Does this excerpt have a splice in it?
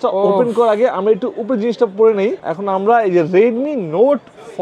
yes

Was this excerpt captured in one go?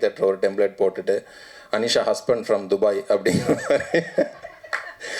yes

